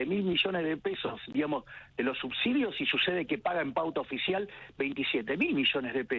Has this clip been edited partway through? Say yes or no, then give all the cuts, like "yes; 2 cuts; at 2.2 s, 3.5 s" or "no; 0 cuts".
no; 0 cuts